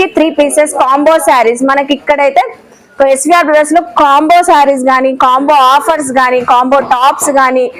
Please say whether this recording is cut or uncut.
uncut